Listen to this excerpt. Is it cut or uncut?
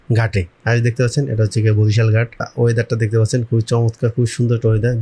cut